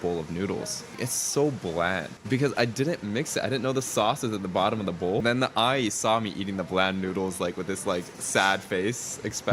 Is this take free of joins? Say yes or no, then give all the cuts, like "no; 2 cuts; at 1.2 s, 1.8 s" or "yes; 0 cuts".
no; 3 cuts; at 0.9 s, 2.1 s, 5.2 s